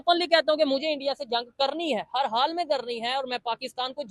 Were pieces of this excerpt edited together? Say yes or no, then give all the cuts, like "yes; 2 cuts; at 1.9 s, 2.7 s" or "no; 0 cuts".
no; 0 cuts